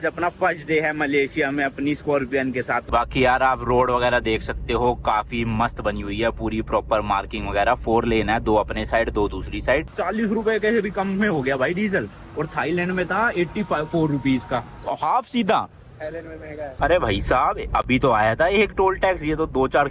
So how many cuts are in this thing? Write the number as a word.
three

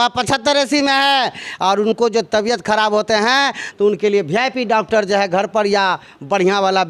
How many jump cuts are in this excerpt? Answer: zero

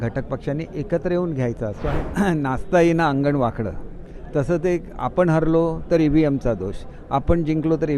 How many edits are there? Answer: one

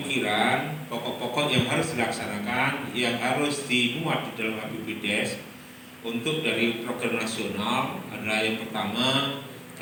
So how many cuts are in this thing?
zero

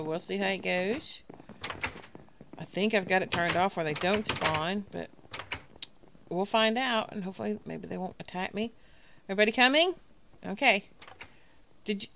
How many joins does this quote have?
one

